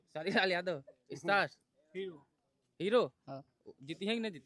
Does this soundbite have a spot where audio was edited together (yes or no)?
no